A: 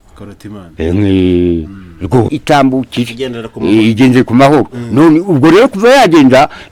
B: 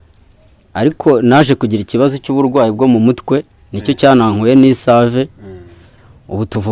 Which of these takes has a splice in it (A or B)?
A